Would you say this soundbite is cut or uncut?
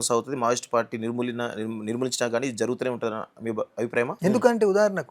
cut